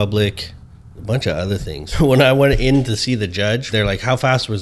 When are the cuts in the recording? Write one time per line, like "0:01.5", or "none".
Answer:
0:01.9
0:03.6